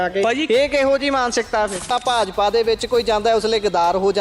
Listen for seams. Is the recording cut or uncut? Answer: cut